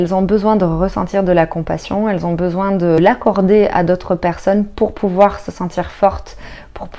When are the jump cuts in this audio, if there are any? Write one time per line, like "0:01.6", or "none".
0:03.0